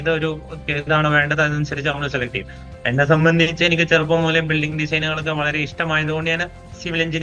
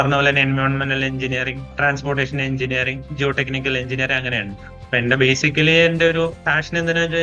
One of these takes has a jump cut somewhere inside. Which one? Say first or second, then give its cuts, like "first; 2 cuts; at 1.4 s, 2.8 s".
second; 1 cut; at 1.7 s